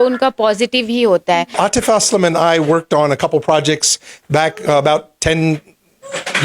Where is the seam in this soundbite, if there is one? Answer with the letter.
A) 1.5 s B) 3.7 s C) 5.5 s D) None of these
A